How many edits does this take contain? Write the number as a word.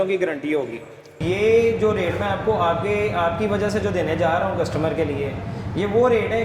one